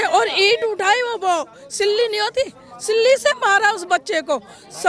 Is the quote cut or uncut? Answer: uncut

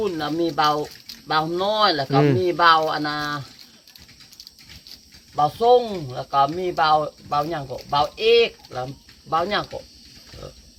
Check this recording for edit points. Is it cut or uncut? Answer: uncut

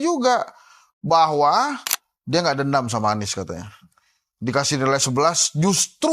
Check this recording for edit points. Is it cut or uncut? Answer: uncut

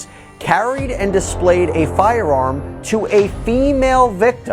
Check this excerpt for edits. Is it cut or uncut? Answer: uncut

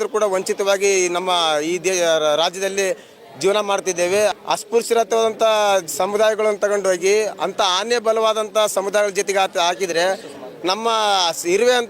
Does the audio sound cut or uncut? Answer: cut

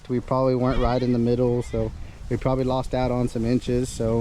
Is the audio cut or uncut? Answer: uncut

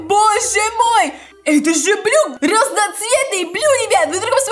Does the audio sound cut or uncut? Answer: cut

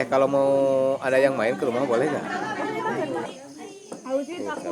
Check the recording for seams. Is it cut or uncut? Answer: cut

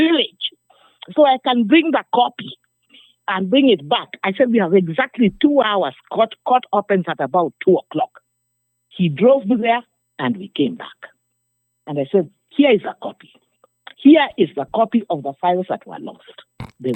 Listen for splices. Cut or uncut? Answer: uncut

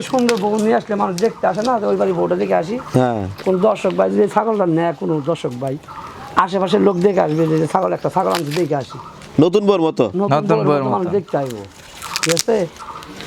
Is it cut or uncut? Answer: uncut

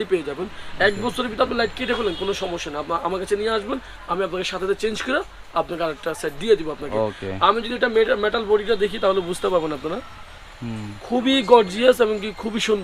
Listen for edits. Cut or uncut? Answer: uncut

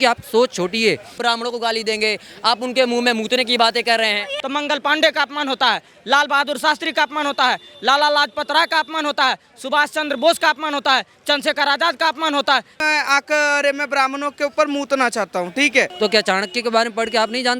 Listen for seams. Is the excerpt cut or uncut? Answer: cut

